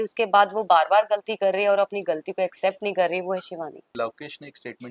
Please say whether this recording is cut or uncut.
cut